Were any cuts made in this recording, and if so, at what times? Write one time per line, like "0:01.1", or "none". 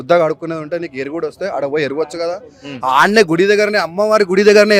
none